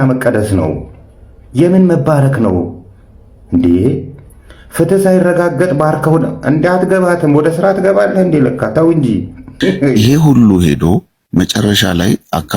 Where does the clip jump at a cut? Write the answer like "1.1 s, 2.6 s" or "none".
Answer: 10.0 s